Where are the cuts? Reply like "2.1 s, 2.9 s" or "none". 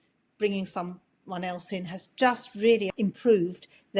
2.9 s